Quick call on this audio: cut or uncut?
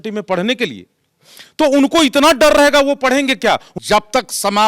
cut